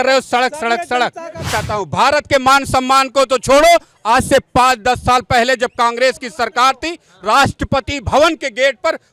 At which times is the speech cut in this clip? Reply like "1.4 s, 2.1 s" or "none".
1.4 s

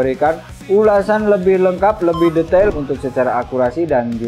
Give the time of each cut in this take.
2.8 s

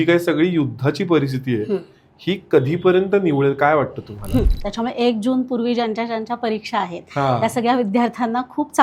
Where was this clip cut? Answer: 4.6 s

